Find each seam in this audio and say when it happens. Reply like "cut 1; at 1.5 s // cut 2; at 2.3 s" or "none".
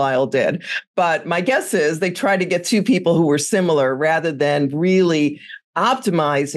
none